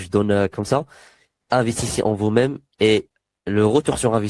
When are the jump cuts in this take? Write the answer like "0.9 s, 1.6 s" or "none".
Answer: none